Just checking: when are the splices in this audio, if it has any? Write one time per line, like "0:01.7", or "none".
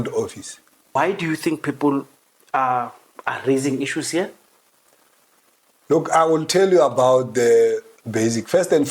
0:01.0